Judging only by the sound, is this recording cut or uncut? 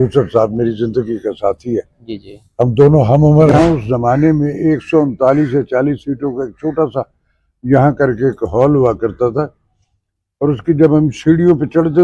cut